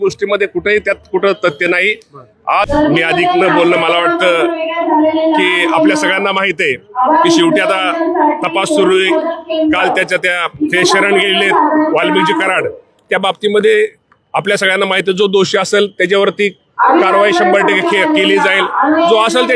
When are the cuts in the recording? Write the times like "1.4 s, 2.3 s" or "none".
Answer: 2.7 s